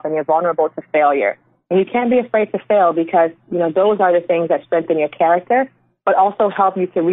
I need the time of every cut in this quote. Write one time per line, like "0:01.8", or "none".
none